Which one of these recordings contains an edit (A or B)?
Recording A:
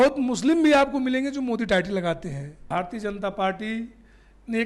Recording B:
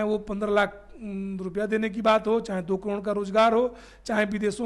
A